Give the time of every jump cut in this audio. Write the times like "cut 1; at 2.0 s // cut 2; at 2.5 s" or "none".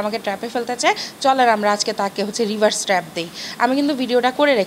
none